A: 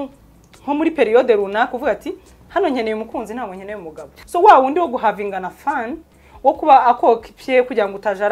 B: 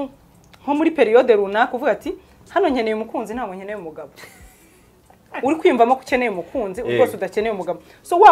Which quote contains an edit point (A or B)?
A